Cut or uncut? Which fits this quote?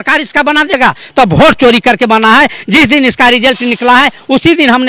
uncut